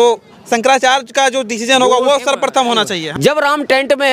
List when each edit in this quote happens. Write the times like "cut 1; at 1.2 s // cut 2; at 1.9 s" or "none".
cut 1; at 3.0 s